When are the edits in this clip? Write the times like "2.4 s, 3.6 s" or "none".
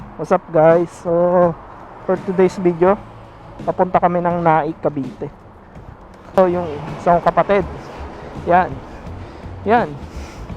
6.4 s